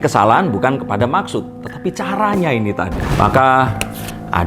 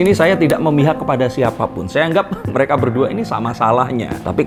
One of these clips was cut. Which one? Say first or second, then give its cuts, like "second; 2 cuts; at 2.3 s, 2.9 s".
first; 1 cut; at 3.0 s